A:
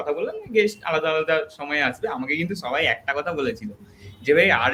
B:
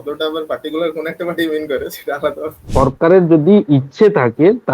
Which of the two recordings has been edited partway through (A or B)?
B